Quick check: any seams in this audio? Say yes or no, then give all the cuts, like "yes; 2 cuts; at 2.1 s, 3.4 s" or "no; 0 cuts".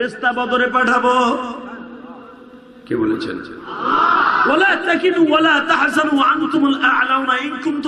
no; 0 cuts